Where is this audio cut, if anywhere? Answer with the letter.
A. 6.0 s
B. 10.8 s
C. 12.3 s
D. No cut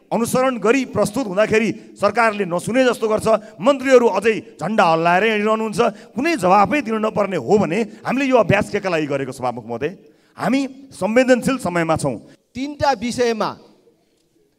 C